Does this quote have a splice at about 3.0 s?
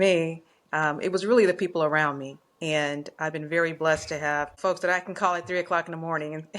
no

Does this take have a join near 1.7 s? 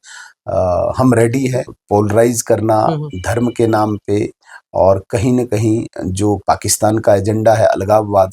yes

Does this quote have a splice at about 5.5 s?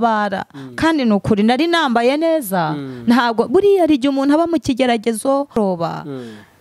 yes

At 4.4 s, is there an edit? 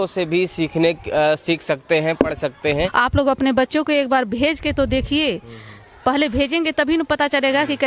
no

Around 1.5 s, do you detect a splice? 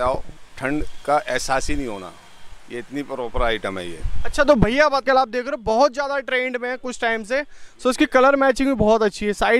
no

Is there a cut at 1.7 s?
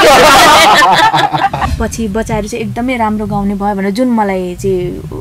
yes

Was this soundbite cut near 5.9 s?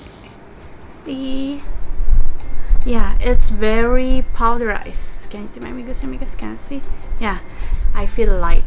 no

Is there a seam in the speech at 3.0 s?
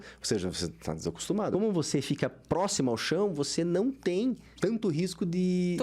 no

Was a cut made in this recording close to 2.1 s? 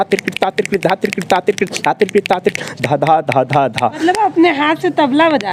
no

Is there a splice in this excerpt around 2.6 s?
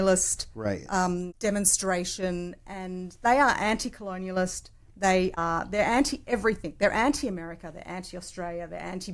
no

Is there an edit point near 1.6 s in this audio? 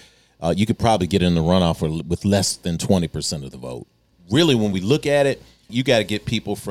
no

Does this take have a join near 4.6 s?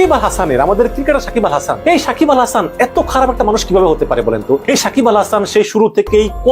yes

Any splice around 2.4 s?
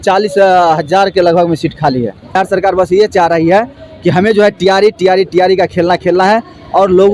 yes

